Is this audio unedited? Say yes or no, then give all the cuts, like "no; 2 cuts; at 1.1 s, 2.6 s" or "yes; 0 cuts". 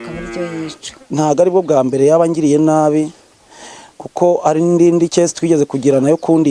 no; 1 cut; at 1.1 s